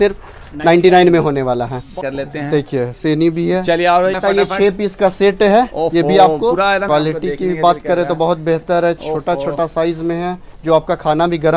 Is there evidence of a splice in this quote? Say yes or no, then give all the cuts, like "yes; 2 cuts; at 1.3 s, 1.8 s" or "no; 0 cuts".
yes; 3 cuts; at 2.0 s, 4.2 s, 6.8 s